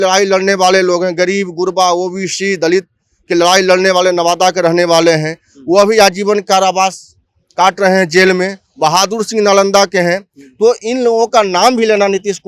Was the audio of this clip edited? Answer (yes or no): no